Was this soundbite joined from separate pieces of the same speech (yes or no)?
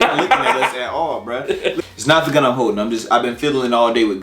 yes